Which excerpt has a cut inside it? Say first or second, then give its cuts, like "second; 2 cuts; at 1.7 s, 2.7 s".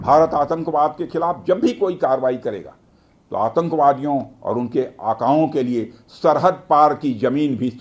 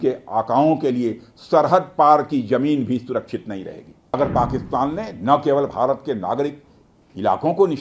second; 1 cut; at 4.1 s